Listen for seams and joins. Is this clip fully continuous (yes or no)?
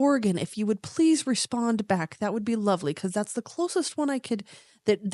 yes